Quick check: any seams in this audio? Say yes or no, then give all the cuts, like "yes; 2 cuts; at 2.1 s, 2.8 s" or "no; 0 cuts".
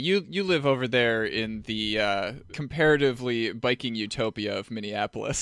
no; 0 cuts